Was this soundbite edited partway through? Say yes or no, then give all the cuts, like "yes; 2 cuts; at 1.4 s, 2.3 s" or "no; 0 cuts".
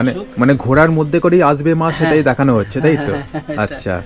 no; 0 cuts